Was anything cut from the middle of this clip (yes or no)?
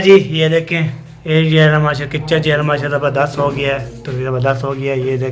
no